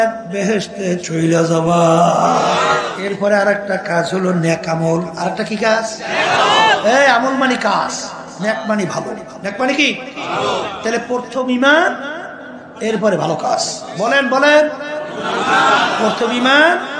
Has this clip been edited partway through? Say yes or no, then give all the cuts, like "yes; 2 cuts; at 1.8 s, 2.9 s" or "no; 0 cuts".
yes; 1 cut; at 2.9 s